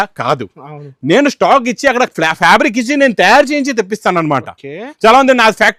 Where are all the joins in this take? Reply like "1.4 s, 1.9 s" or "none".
none